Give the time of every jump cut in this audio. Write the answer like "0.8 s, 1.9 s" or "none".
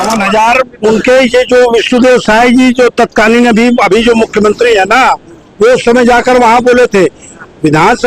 none